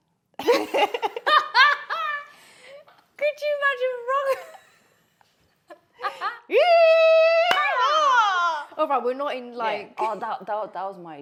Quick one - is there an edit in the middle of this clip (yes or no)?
no